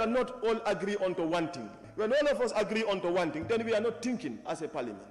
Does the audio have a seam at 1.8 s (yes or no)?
yes